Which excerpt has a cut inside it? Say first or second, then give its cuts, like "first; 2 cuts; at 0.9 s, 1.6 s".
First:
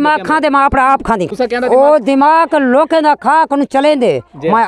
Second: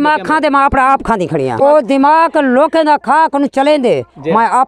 second; 1 cut; at 1.6 s